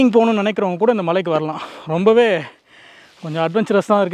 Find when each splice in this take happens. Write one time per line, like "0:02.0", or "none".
none